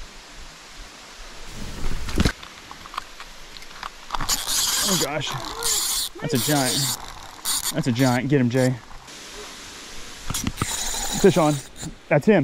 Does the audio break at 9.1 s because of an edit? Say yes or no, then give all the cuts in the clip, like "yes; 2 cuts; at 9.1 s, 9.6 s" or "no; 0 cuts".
yes; 2 cuts; at 2.3 s, 9.1 s